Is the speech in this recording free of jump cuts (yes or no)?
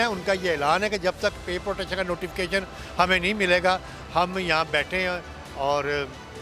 yes